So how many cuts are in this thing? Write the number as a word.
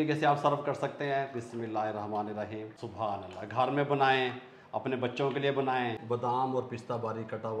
two